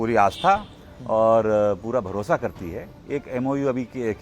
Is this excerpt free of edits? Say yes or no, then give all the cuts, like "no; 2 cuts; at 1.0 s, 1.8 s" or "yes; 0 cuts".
no; 1 cut; at 3.0 s